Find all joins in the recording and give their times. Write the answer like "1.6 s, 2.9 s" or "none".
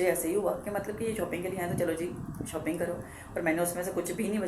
none